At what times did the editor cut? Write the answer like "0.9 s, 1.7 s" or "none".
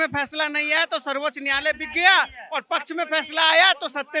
none